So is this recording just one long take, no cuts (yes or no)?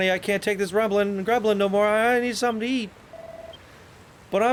yes